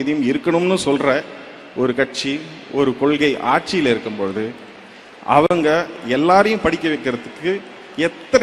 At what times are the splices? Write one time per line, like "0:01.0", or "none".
none